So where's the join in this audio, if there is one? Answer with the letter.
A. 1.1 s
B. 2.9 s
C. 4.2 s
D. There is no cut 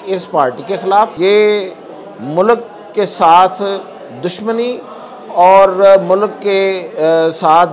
A